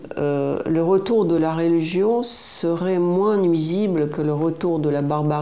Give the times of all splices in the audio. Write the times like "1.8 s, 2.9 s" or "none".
none